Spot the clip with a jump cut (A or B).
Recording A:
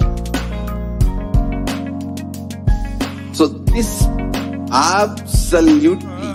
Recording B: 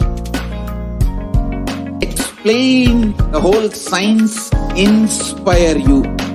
B